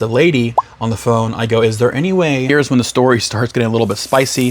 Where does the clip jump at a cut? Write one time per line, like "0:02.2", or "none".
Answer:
0:02.5